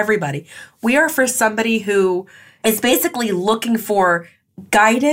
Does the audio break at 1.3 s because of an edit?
no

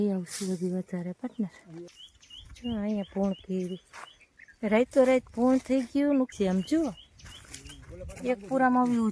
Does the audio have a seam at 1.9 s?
yes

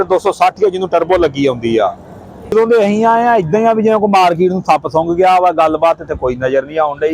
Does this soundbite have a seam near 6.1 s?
no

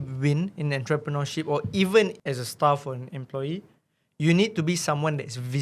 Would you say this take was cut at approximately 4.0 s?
no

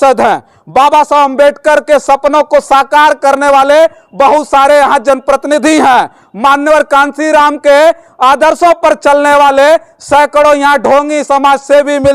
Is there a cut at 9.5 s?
no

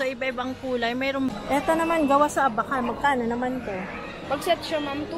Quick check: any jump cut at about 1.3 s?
yes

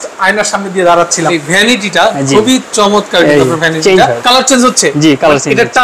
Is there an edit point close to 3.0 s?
no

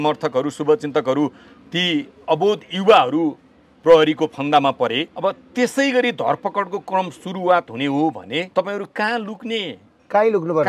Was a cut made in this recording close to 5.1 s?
yes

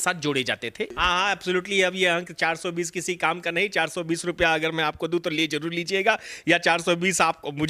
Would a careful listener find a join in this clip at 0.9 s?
yes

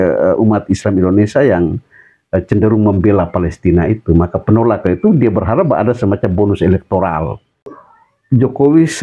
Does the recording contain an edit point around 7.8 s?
yes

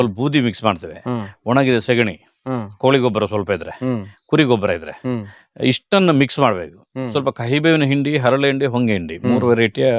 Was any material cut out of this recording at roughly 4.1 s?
no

